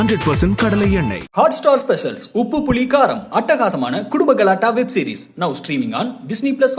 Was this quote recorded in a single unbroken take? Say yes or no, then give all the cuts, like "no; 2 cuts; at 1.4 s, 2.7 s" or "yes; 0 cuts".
yes; 0 cuts